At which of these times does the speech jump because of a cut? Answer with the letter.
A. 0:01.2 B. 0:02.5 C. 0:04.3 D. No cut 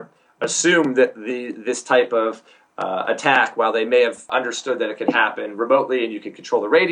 C